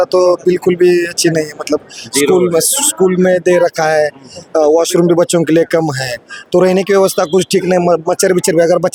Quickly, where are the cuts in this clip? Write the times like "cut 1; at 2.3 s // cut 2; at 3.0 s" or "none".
none